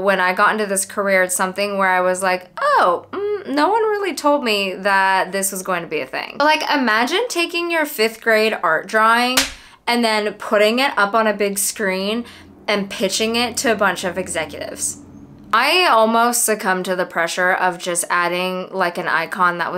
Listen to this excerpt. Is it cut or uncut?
cut